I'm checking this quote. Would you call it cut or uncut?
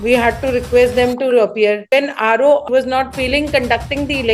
cut